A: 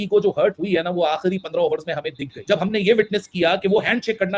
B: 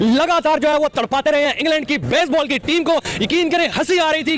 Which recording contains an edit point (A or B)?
A